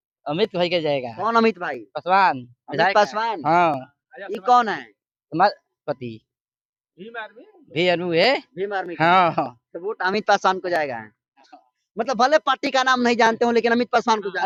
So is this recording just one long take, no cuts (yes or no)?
yes